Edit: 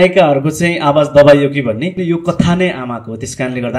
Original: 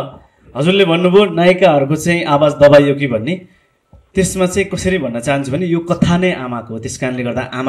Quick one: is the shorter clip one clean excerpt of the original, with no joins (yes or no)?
no